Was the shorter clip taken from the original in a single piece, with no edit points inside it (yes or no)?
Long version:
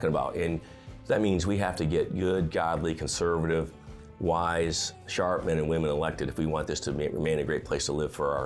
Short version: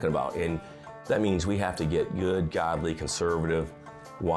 yes